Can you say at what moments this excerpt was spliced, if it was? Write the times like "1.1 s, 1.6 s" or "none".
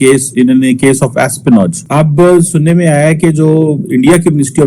1.8 s